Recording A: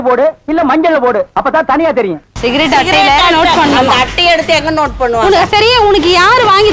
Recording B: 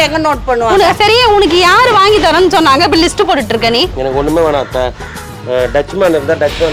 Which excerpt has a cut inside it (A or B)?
A